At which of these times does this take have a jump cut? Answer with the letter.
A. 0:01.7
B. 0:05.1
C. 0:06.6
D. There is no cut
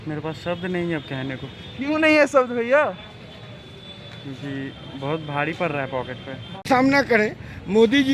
C